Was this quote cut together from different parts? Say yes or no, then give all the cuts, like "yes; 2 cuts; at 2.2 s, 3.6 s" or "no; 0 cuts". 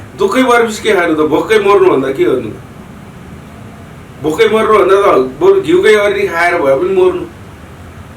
no; 0 cuts